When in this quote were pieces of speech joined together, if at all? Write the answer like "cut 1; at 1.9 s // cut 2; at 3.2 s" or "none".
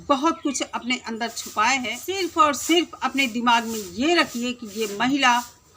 cut 1; at 2.2 s